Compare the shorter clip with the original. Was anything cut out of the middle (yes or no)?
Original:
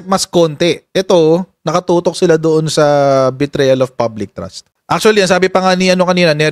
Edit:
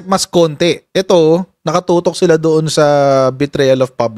no